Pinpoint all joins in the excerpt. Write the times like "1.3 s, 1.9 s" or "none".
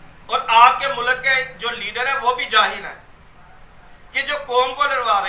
none